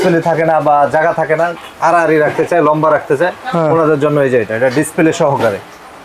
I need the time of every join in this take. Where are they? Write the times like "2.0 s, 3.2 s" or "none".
none